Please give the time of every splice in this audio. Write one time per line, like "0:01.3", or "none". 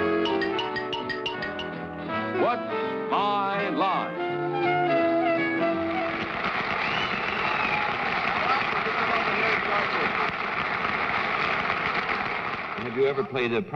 none